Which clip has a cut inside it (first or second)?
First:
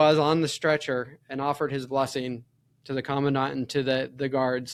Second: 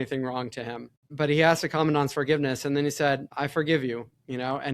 second